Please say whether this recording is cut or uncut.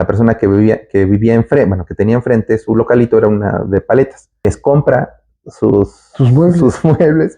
cut